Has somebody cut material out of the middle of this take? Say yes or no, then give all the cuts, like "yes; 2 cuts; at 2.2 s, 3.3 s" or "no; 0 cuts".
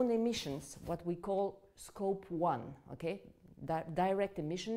no; 0 cuts